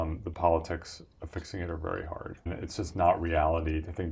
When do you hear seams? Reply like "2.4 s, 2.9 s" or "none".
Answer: 2.6 s